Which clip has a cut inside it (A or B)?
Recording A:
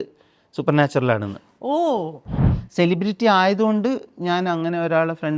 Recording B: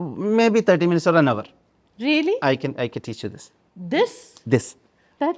A